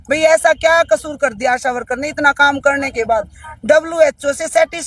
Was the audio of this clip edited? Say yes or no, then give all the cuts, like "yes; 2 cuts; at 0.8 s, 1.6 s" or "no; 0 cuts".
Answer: no; 0 cuts